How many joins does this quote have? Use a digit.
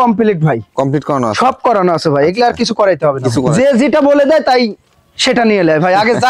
1